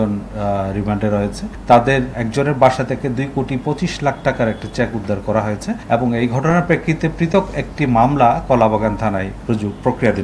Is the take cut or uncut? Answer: cut